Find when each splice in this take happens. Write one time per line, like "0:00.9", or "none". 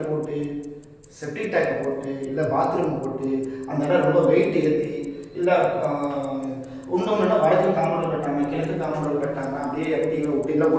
none